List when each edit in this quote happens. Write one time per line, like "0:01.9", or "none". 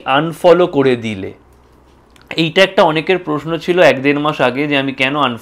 none